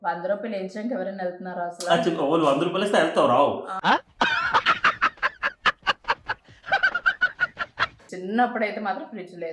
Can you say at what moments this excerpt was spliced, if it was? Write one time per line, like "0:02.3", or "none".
0:07.9